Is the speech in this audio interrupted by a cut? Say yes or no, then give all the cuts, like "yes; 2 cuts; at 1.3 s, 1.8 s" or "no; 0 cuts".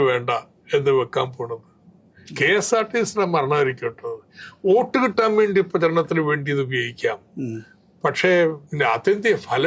yes; 1 cut; at 8.6 s